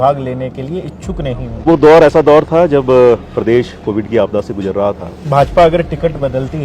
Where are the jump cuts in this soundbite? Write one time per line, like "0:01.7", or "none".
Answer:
0:01.6
0:05.2